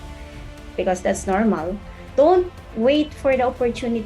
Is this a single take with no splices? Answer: no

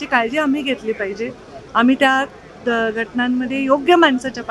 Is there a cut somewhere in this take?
no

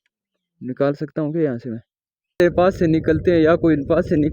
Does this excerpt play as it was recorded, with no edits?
no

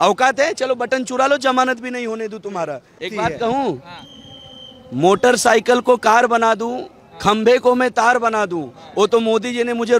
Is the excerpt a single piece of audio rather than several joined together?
no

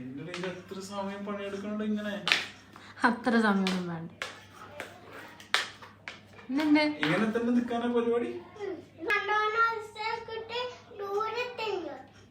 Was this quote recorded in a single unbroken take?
no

